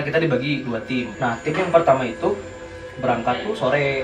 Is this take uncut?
no; 1 cut; at 1.1 s

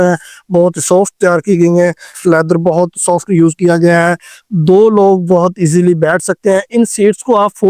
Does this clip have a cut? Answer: no; 0 cuts

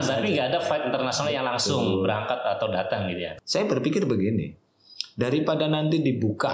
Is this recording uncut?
no; 1 cut; at 3.3 s

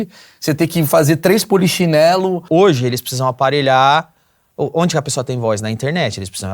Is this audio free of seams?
no; 1 cut; at 2.5 s

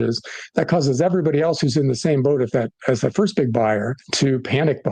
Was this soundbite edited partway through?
yes; 1 cut; at 4.0 s

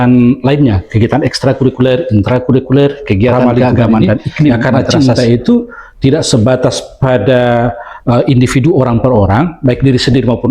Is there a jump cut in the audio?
yes; 1 cut; at 4.6 s

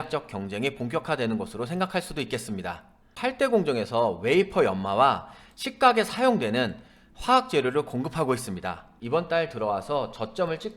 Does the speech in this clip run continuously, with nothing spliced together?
no; 2 cuts; at 3.2 s, 8.9 s

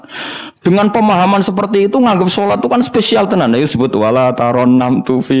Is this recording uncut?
yes; 0 cuts

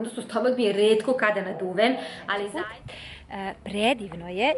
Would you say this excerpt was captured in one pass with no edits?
no; 1 cut; at 2.5 s

